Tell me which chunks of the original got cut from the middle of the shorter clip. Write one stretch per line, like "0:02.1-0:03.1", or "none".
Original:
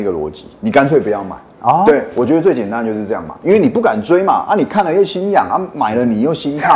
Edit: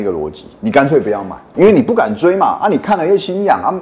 0:01.4-0:03.3